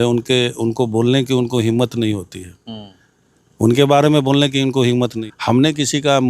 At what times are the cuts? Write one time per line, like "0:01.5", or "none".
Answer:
0:05.3